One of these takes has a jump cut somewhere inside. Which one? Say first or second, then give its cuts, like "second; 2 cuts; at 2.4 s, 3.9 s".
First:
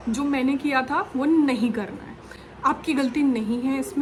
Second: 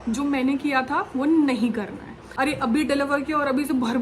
second; 1 cut; at 2.2 s